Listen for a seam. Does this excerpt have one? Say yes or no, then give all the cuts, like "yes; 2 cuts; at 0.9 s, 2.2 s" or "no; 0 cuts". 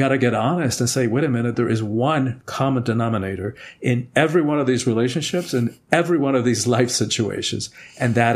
no; 0 cuts